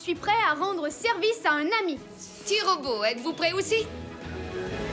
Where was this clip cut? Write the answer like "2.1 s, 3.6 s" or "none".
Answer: 3.9 s